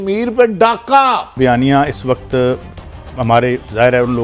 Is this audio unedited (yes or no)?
no